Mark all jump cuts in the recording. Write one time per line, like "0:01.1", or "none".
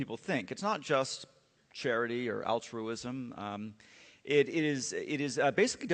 0:04.9

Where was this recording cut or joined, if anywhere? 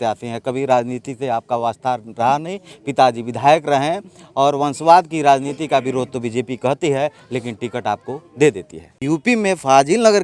0:09.0

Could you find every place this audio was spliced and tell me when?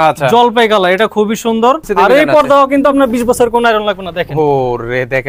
0:01.8

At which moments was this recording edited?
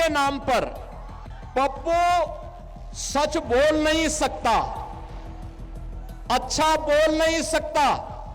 none

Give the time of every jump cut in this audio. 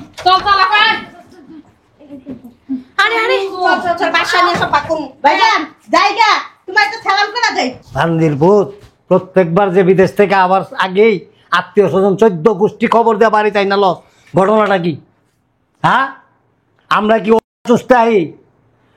0:07.8

